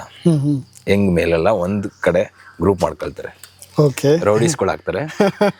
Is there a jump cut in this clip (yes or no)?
no